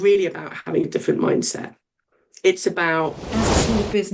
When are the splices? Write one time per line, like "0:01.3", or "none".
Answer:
0:03.2

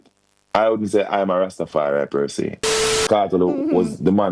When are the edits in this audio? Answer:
0:03.0

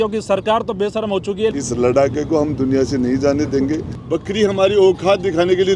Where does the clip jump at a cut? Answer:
0:01.5
0:03.9

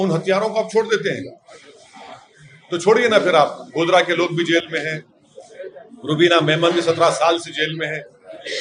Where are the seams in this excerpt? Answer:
none

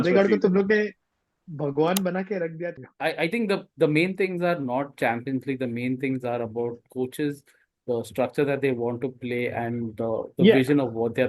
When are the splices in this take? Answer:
0:02.7

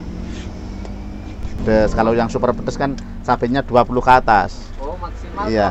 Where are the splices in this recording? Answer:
0:01.6

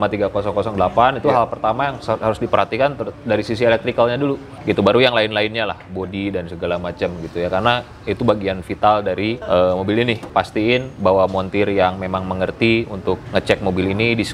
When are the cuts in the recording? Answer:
0:04.5
0:09.4
0:10.2
0:13.2

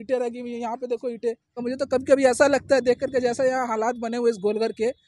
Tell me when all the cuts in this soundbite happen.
0:01.6

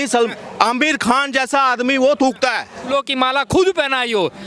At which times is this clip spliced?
0:02.9

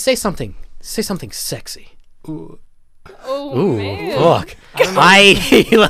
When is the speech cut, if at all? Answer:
none

